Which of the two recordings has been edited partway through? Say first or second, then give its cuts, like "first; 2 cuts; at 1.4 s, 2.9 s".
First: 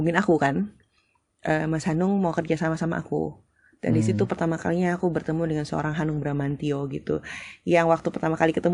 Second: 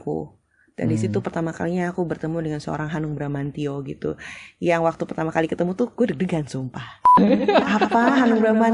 second; 1 cut; at 7.2 s